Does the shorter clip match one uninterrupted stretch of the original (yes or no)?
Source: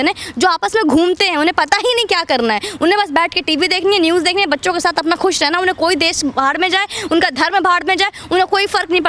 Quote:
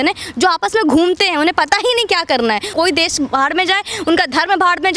no